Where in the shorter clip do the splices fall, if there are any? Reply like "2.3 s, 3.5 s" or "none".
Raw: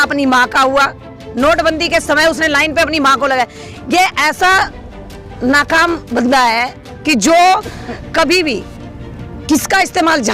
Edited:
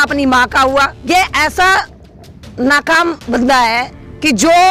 0.9 s